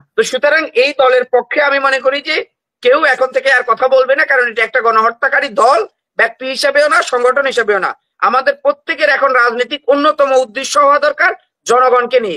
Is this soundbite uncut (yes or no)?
yes